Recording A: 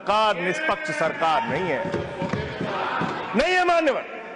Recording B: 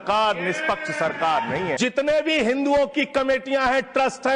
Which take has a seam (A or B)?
B